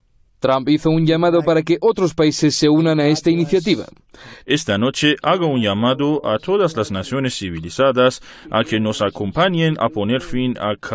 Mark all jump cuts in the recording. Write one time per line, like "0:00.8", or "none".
0:03.6